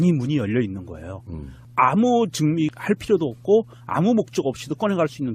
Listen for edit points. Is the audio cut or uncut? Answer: cut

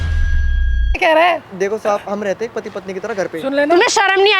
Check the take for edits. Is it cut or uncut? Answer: cut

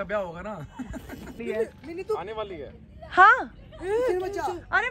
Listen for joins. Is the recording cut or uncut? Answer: cut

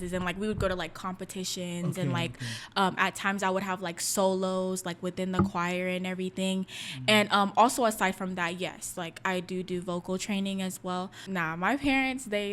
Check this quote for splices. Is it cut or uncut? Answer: cut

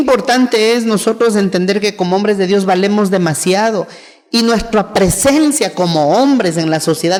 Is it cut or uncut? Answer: uncut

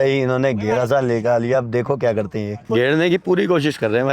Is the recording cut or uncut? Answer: cut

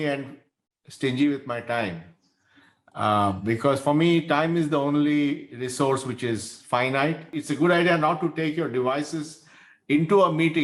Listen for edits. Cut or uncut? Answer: cut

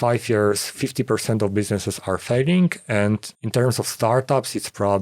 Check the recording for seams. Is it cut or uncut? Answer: cut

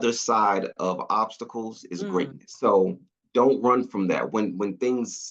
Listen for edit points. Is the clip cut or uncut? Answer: cut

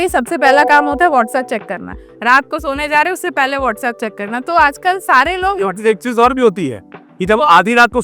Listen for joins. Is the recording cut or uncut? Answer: uncut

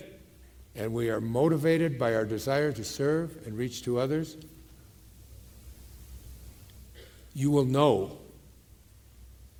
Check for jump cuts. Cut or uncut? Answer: uncut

